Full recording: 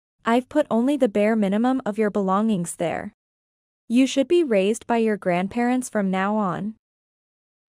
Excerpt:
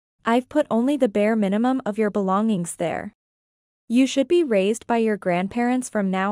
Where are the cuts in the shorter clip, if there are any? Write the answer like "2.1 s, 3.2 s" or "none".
none